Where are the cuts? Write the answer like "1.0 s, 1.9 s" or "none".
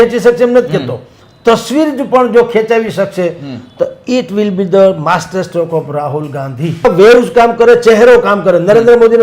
6.8 s

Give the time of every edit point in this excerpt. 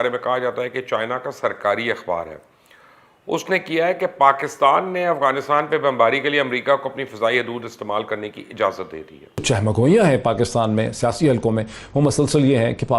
9.4 s

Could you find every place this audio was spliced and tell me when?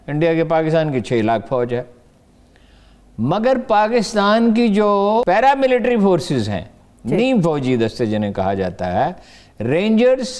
none

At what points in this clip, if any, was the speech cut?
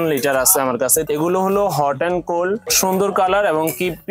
1.1 s, 2.7 s

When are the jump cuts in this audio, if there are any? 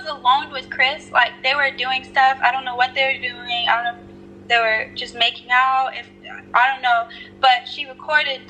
none

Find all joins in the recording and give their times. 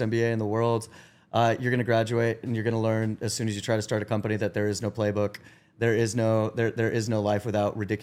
none

